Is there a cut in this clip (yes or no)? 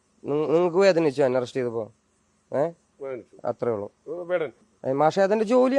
yes